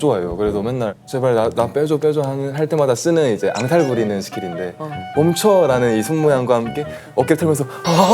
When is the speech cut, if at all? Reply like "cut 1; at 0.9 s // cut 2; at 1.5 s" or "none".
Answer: cut 1; at 1.0 s // cut 2; at 5.0 s